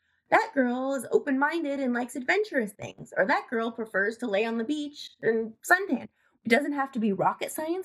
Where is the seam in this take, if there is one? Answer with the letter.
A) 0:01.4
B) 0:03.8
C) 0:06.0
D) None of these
C